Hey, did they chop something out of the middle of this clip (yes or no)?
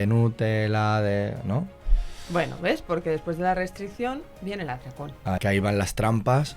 yes